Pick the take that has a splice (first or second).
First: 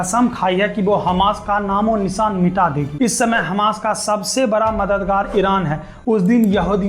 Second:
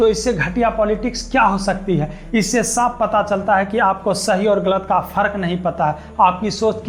first